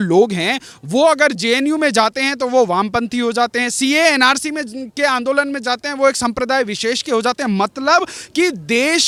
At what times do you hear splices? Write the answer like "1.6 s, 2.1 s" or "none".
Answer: none